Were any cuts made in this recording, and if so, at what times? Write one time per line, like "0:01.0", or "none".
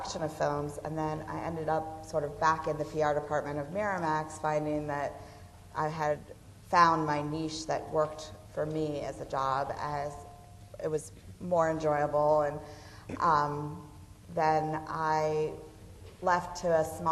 0:09.2